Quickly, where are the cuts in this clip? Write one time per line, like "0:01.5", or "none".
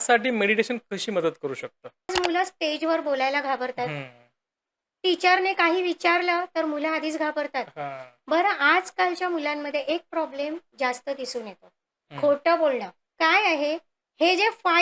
0:02.1
0:13.0